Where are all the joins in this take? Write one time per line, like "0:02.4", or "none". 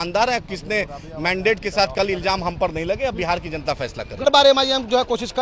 0:04.2